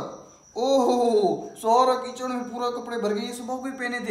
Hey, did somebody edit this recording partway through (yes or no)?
no